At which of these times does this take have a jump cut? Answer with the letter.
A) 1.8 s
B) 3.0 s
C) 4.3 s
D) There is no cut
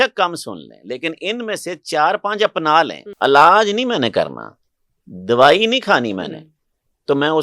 B